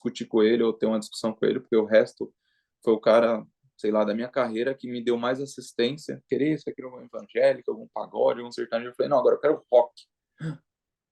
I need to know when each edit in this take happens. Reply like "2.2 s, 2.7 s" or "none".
6.3 s